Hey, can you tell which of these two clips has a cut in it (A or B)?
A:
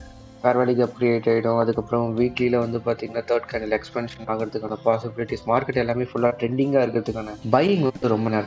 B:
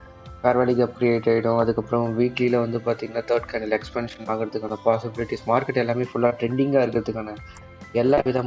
A